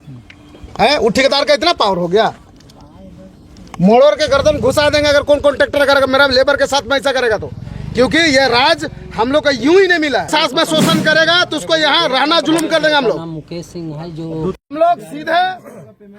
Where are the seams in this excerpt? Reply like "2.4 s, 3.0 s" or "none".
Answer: 10.3 s